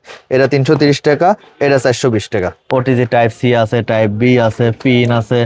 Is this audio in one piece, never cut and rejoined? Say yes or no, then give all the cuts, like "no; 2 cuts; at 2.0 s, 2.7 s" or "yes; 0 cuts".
no; 1 cut; at 2.6 s